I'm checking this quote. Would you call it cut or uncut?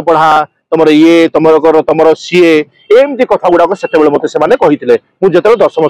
uncut